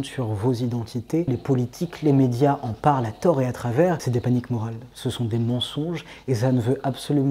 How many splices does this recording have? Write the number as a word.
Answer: two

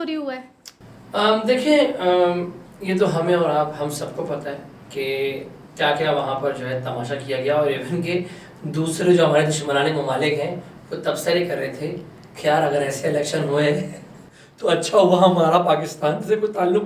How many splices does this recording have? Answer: zero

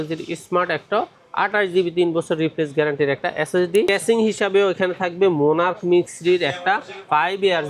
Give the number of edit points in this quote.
one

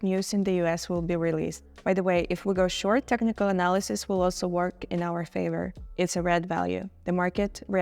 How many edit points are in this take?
two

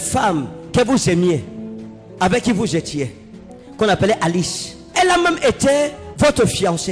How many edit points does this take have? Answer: one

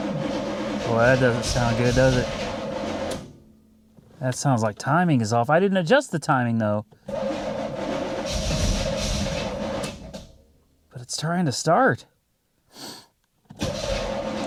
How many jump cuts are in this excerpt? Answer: zero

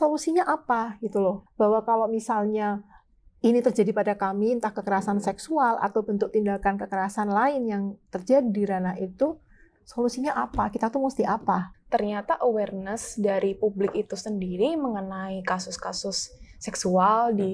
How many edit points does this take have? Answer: two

